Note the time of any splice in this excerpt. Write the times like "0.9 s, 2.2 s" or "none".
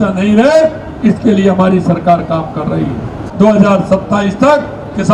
3.2 s